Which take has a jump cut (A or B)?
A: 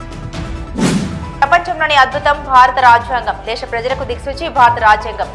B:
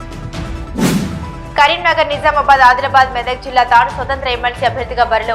B